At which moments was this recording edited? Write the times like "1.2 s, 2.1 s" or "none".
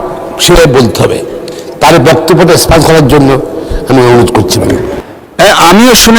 5.0 s